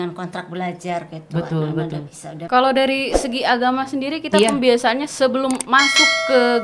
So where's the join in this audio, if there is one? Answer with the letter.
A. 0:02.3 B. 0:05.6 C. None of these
A